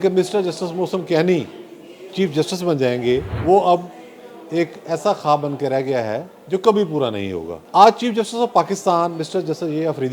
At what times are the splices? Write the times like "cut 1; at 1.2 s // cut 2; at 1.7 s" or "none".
cut 1; at 3.3 s // cut 2; at 7.5 s